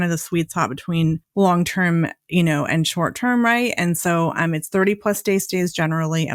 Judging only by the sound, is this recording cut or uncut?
uncut